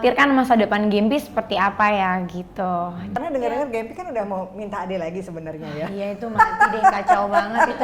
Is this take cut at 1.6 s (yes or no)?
no